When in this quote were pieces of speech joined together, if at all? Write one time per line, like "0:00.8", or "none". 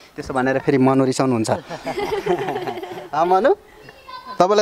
none